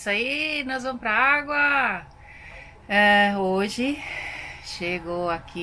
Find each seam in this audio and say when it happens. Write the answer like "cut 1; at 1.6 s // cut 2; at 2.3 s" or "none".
none